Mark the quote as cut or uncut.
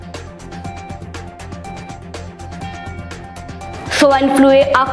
uncut